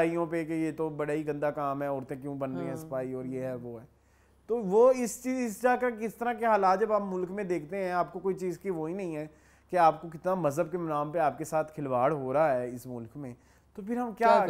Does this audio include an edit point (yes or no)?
no